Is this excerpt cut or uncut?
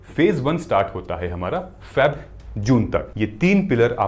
cut